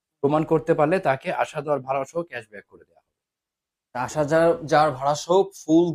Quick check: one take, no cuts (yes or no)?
yes